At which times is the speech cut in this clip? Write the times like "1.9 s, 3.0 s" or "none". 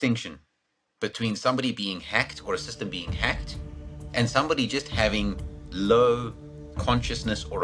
6.7 s